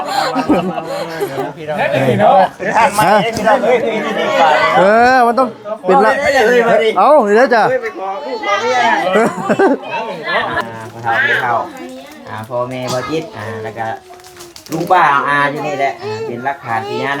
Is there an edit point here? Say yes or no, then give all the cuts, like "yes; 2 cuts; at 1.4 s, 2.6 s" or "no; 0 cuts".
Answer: yes; 1 cut; at 10.6 s